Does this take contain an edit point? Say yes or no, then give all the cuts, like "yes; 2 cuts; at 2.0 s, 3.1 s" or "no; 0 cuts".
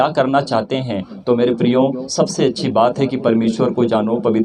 no; 0 cuts